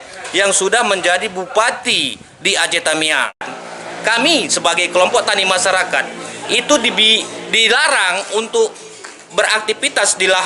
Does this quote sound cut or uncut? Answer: cut